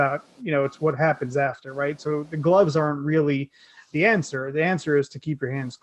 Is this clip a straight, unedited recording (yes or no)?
yes